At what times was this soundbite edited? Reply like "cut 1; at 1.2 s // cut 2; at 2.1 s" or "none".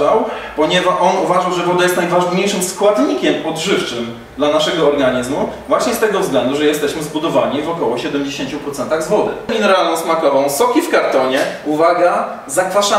cut 1; at 9.5 s